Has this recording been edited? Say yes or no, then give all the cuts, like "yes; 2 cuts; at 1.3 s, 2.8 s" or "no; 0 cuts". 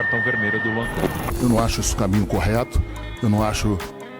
yes; 1 cut; at 1.3 s